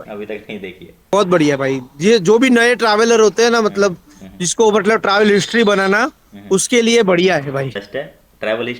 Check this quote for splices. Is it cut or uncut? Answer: cut